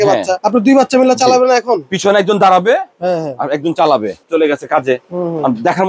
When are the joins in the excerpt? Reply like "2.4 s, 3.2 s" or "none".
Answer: 4.2 s